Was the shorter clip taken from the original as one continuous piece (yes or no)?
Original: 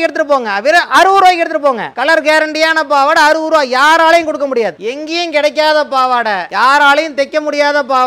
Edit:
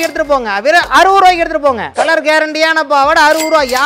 yes